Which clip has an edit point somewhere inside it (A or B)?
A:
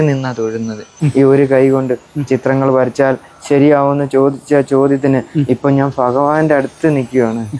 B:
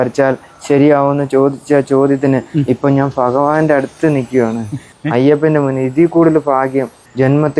A